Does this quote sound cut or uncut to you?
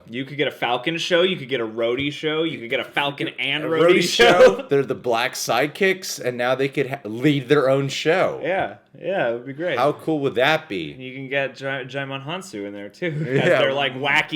uncut